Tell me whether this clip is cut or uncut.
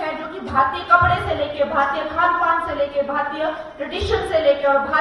uncut